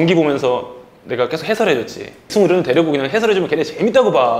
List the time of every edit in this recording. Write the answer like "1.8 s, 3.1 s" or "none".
2.3 s